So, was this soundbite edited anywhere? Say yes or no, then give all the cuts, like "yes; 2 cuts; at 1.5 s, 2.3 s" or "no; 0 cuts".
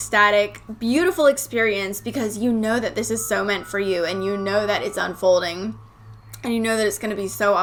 no; 0 cuts